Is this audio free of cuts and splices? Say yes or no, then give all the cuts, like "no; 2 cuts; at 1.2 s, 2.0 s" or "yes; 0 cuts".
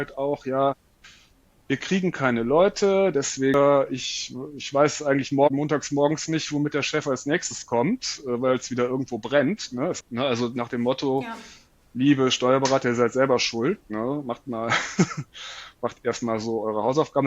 no; 2 cuts; at 3.5 s, 10.0 s